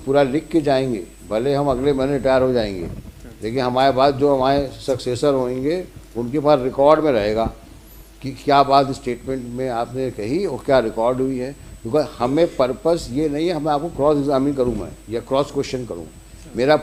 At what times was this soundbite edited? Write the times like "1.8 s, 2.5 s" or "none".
none